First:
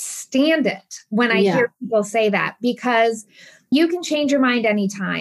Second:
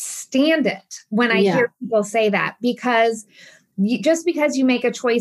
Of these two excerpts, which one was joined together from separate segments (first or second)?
second